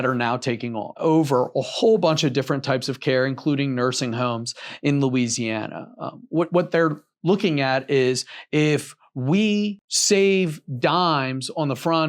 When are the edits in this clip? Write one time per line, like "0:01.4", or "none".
0:01.0
0:09.8